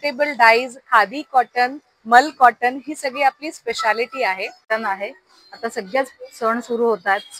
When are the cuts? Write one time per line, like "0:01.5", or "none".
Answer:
0:04.7